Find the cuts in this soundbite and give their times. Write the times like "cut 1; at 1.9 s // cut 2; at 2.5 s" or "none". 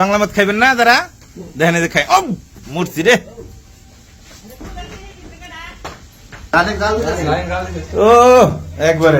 none